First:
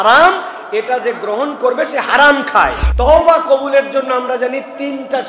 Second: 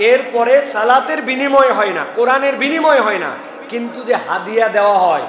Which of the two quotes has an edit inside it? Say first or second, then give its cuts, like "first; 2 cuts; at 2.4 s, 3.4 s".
first; 1 cut; at 2.8 s